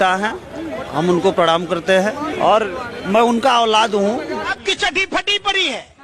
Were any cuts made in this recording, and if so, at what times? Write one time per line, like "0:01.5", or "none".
0:04.5